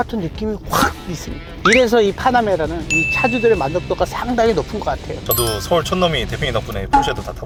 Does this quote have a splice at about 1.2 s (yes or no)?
no